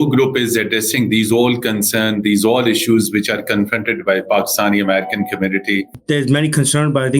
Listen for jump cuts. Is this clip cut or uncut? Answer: cut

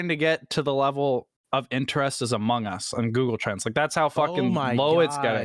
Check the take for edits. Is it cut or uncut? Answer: uncut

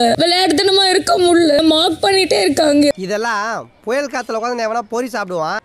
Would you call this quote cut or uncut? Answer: cut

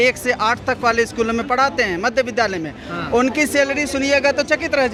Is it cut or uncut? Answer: uncut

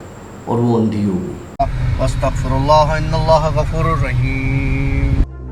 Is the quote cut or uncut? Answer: cut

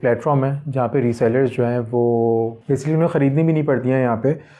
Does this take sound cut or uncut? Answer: cut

